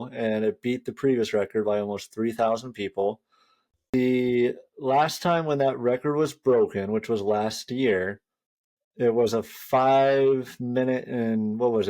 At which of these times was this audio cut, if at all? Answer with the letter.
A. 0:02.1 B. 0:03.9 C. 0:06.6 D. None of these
B